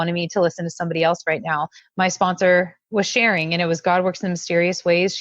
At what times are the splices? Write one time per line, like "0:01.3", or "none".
0:01.8